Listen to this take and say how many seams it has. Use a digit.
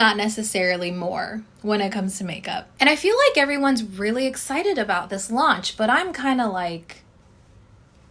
1